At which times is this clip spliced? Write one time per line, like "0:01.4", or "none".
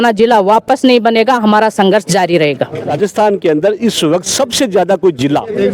0:02.9